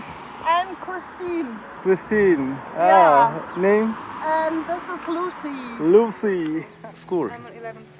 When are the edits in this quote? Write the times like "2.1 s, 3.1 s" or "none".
6.6 s